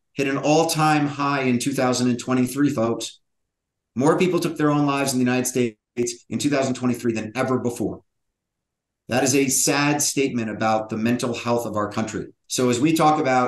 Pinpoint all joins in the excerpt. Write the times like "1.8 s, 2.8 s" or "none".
12.4 s